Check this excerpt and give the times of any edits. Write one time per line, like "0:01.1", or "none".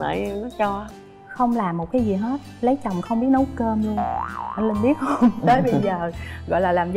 0:00.9